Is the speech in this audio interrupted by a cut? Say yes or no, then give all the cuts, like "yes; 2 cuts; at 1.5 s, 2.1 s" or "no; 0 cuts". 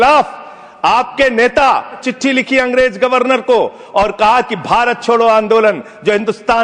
yes; 1 cut; at 2.1 s